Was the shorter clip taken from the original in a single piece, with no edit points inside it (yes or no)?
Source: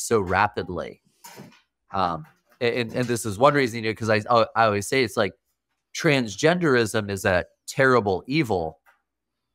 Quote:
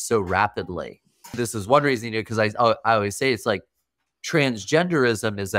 no